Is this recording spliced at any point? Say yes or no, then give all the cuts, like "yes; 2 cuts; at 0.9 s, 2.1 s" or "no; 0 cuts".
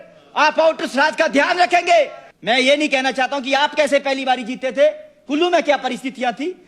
yes; 1 cut; at 2.3 s